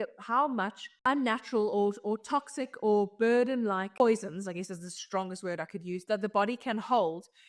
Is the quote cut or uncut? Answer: cut